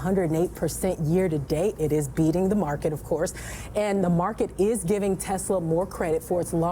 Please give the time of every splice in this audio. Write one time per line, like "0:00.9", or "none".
none